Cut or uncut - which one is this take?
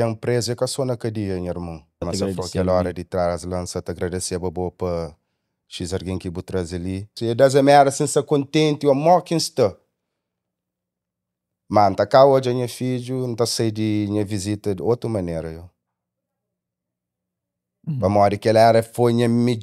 cut